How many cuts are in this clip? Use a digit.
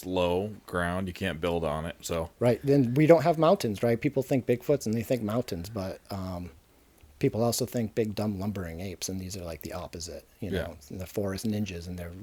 0